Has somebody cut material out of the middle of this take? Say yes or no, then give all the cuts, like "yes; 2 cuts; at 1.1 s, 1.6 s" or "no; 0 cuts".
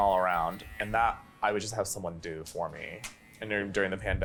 no; 0 cuts